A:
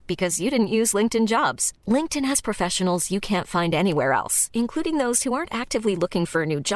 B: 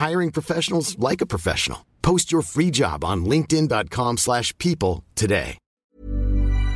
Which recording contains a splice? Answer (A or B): B